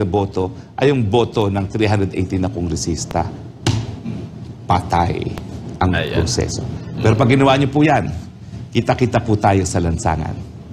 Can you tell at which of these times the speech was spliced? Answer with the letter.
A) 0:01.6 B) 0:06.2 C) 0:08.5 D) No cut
D